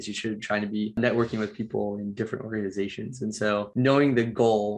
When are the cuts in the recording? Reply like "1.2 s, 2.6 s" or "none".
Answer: 1.0 s